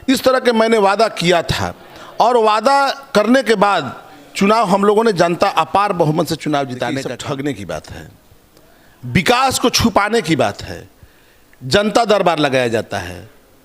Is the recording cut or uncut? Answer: cut